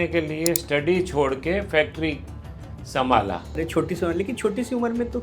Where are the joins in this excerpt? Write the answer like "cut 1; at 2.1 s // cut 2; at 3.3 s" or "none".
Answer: cut 1; at 3.6 s